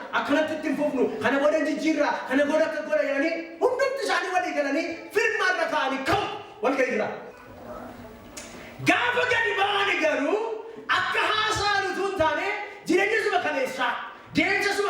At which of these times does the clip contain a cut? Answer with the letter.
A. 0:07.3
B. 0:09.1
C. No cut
A